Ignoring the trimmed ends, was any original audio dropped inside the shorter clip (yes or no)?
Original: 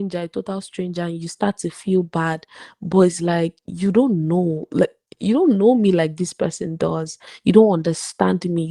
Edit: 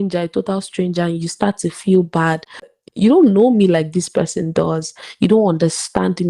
yes